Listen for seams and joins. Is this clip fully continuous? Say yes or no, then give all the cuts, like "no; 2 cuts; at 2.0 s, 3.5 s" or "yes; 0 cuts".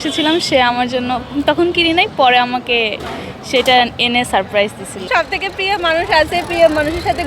no; 1 cut; at 5.0 s